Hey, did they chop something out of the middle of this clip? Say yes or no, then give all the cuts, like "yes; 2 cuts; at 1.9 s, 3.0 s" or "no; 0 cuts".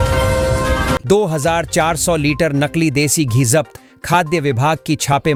no; 0 cuts